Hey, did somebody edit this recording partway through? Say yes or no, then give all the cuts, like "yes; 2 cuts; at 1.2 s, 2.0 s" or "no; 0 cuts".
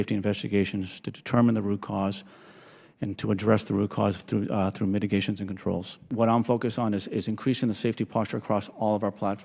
yes; 1 cut; at 6.1 s